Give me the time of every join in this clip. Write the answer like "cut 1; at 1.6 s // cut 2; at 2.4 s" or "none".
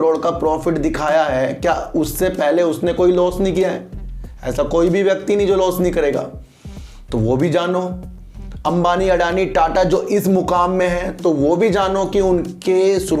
none